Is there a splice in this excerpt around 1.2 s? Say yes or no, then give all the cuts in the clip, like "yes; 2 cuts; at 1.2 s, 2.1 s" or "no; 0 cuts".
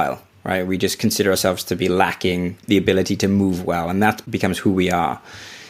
no; 2 cuts; at 2.6 s, 4.2 s